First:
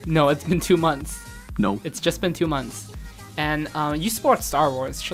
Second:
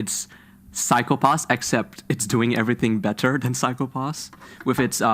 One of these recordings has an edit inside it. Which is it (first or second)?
second